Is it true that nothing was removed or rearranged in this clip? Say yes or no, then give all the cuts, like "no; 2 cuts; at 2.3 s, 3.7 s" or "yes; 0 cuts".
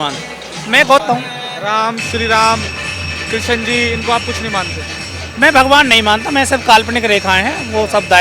no; 1 cut; at 1.0 s